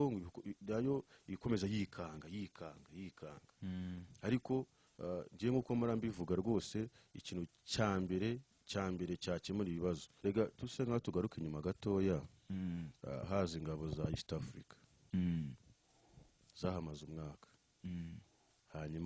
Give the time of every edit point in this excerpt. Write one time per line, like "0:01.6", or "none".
0:10.1